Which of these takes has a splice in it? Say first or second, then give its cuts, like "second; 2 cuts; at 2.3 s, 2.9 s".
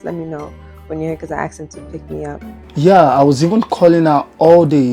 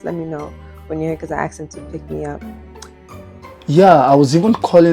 first; 1 cut; at 2.6 s